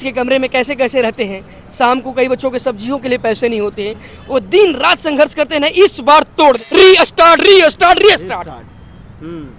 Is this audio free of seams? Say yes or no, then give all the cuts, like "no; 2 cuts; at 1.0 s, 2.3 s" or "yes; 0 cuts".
no; 1 cut; at 6.6 s